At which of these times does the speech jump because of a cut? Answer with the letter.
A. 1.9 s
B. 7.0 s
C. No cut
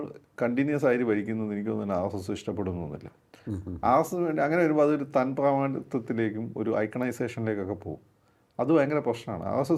C